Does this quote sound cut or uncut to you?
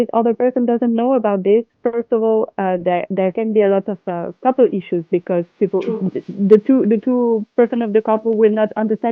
uncut